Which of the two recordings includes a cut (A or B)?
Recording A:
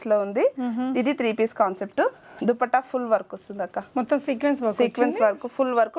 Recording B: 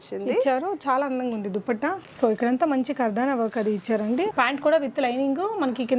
B